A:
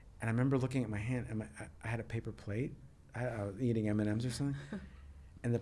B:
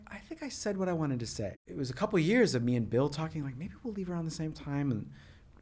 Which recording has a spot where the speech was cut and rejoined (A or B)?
B